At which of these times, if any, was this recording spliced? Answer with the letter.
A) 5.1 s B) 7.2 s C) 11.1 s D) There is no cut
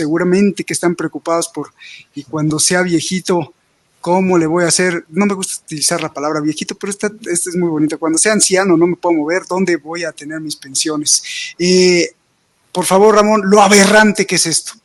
D